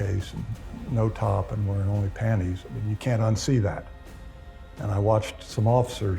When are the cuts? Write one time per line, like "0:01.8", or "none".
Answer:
none